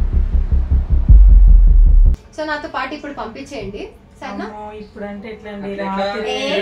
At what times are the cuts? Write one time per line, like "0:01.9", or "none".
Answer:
0:02.1